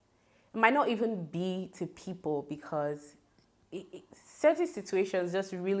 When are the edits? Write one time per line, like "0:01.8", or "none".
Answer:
none